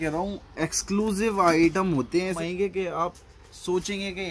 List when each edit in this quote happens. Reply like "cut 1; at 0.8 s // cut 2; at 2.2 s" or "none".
cut 1; at 2.4 s

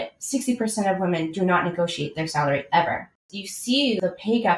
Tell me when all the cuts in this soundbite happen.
cut 1; at 3.5 s

